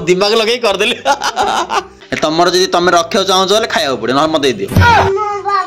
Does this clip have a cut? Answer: yes; 1 cut; at 1.9 s

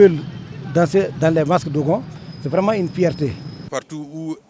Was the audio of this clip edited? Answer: yes; 1 cut; at 3.5 s

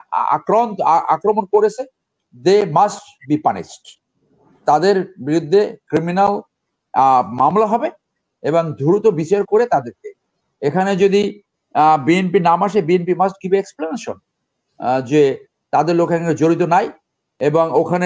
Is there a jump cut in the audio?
no; 0 cuts

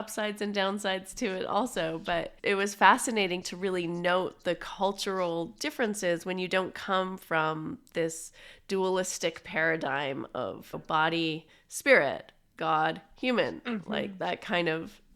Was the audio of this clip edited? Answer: yes; 2 cuts; at 2.3 s, 10.7 s

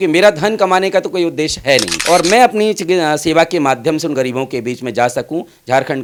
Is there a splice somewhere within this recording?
no; 0 cuts

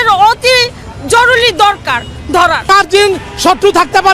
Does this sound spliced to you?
yes; 1 cut; at 2.7 s

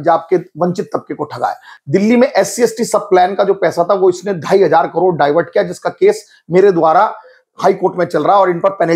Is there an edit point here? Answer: yes; 1 cut; at 1.7 s

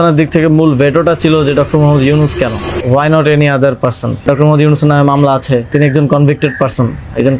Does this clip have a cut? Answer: yes; 3 cuts; at 2.7 s, 4.2 s, 5.7 s

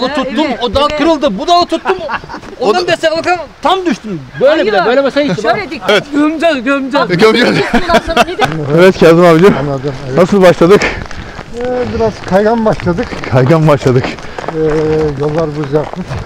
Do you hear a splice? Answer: yes; 2 cuts; at 5.9 s, 8.5 s

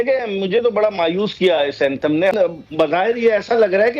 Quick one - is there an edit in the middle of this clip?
yes; 1 cut; at 2.3 s

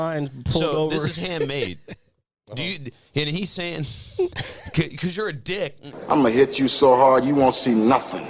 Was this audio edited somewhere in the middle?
yes; 1 cut; at 6.0 s

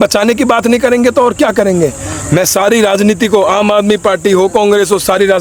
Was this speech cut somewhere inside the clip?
no; 0 cuts

